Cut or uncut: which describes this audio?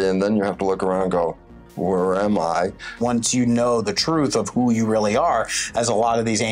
cut